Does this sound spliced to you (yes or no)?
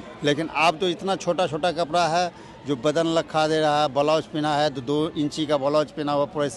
no